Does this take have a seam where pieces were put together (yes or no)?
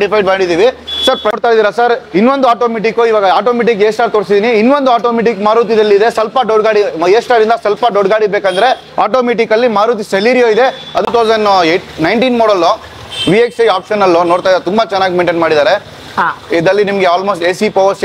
yes